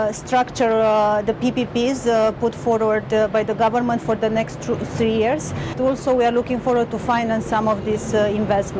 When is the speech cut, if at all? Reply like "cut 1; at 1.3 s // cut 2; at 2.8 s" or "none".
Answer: cut 1; at 5.8 s